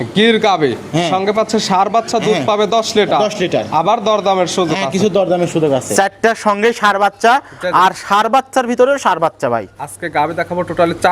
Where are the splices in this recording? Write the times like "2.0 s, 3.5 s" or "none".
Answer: 5.9 s